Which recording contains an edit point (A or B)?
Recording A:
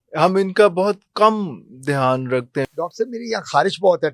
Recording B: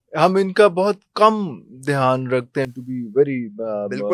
A